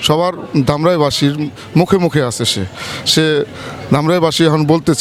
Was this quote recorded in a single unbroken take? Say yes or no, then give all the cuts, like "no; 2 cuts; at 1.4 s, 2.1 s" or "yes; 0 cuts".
yes; 0 cuts